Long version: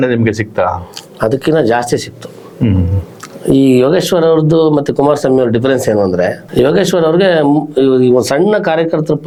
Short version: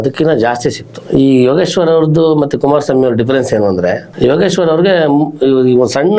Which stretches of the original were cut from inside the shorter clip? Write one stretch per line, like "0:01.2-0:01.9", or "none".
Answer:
0:02.2-0:03.3